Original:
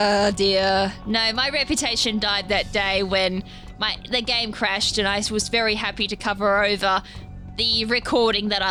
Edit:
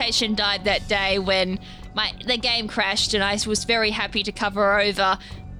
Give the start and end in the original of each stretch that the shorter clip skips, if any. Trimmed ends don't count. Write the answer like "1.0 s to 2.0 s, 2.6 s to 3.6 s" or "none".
none